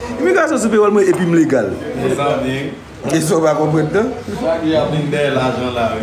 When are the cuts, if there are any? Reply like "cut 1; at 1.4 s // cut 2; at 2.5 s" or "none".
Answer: none